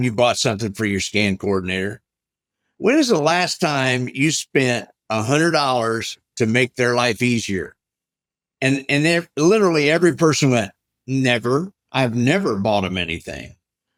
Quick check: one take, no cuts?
yes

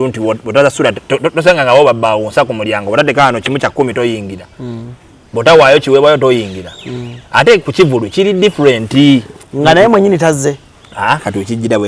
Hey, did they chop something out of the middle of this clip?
no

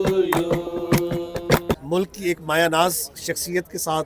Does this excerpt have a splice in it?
yes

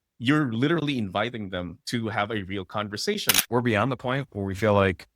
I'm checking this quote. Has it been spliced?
yes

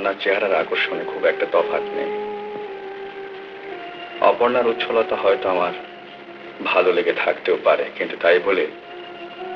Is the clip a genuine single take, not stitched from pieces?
yes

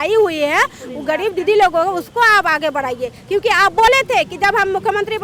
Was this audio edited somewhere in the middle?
no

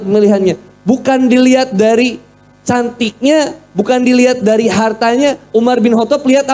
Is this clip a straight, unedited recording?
yes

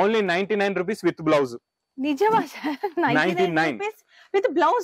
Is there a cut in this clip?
no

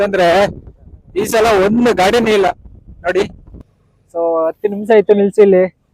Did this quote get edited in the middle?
yes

